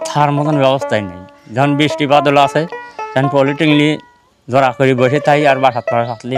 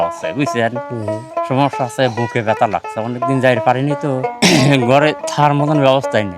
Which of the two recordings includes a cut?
second; 1 cut; at 4.3 s

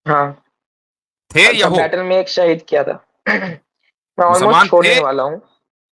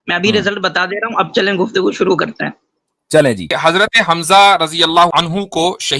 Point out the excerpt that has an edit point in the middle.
second; 2 cuts; at 3.5 s, 5.1 s

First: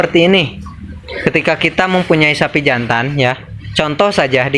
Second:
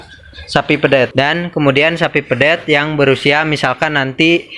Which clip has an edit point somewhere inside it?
second; 1 cut; at 1.1 s

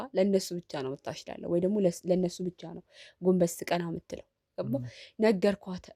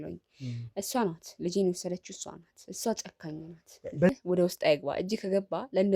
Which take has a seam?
second; 1 cut; at 4.1 s

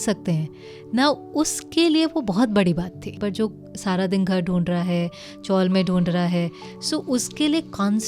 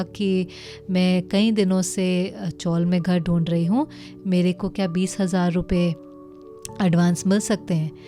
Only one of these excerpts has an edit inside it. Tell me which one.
first; 1 cut; at 3.1 s

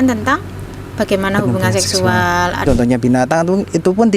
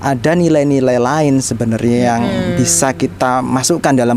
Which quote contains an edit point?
first; 1 cut; at 2.6 s

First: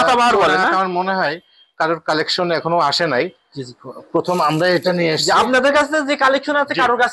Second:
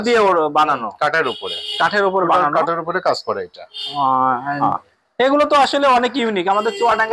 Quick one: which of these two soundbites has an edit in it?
second; 1 cut; at 4.6 s

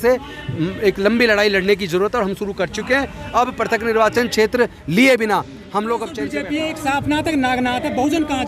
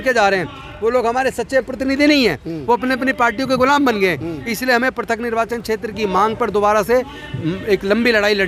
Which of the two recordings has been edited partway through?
first; 1 cut; at 6.4 s

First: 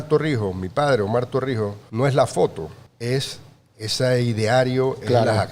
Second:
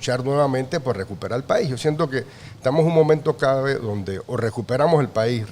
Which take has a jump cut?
first; 2 cuts; at 1.8 s, 2.8 s

